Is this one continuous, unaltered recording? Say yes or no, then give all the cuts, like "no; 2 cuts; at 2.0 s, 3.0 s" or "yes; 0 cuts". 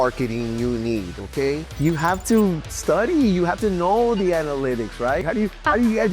no; 2 cuts; at 1.7 s, 5.2 s